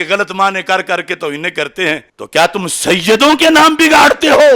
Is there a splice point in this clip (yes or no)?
yes